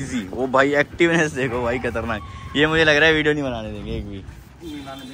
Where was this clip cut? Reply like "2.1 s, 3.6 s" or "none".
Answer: none